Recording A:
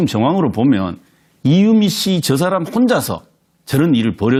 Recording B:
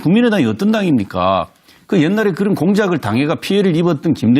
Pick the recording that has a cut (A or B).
B